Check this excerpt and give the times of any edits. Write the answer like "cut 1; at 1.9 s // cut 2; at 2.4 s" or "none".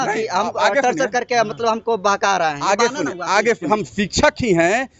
cut 1; at 3.7 s